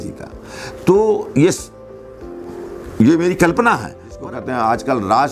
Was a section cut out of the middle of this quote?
yes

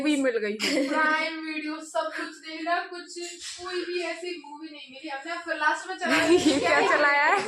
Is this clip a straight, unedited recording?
yes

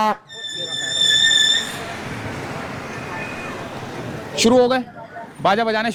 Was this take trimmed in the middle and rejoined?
no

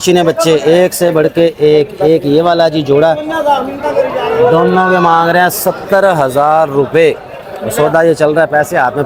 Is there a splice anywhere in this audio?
no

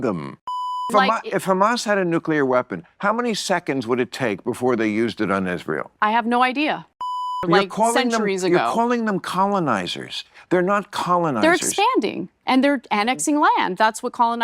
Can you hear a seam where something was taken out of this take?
yes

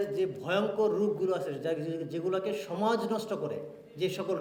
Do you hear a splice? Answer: no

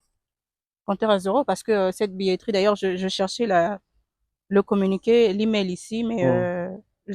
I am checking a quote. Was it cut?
no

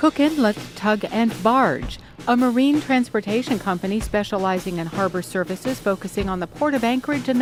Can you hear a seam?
no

